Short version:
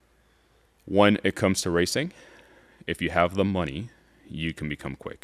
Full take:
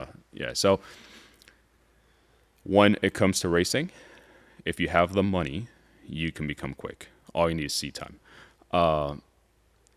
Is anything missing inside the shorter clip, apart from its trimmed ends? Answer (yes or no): no